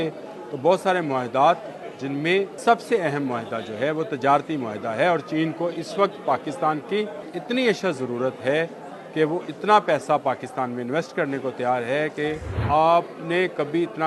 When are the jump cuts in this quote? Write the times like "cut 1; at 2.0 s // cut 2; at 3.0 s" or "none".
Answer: cut 1; at 2.5 s // cut 2; at 7.3 s // cut 3; at 12.6 s